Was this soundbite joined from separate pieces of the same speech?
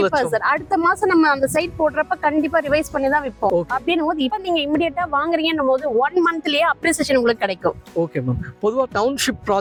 no; 0 cuts

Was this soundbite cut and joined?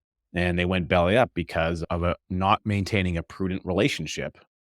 yes; 1 cut; at 1.8 s

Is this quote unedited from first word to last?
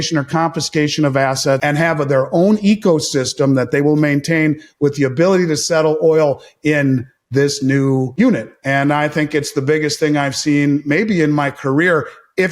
no; 2 cuts; at 1.6 s, 8.1 s

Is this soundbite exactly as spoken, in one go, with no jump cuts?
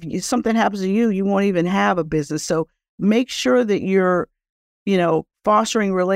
yes; 0 cuts

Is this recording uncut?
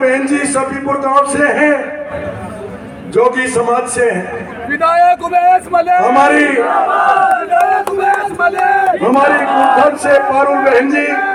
yes; 0 cuts

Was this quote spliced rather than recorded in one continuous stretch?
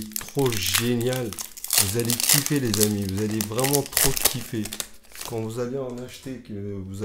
no; 0 cuts

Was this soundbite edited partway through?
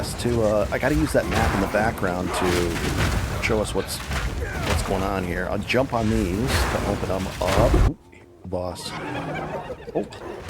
yes; 1 cut; at 7.8 s

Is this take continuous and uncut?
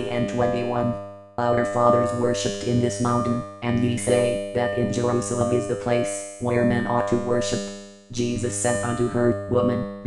yes; 0 cuts

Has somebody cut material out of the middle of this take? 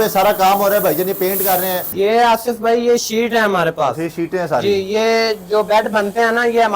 yes; 1 cut; at 1.9 s

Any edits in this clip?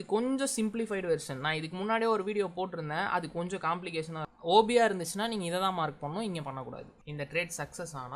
yes; 2 cuts; at 4.2 s, 6.9 s

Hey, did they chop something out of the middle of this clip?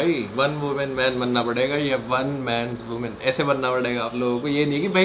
no; 0 cuts

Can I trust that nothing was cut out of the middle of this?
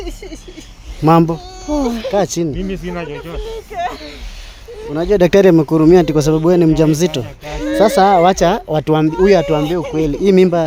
yes; 0 cuts

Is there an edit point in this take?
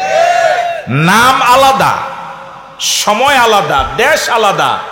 no; 0 cuts

